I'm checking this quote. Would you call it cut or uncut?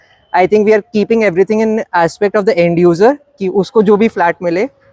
uncut